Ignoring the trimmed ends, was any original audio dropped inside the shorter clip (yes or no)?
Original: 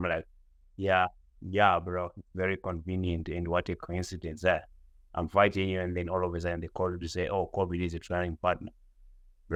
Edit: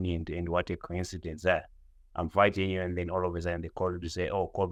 no